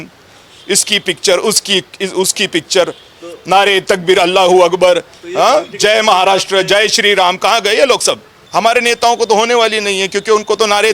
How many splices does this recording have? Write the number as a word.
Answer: one